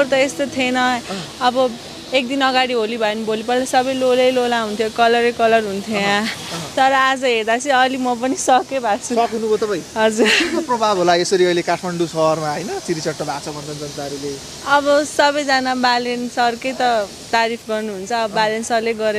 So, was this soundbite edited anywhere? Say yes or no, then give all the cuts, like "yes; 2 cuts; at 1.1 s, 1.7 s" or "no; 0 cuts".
no; 0 cuts